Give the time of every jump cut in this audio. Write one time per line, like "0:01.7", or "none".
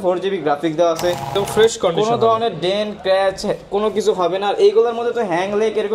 0:01.3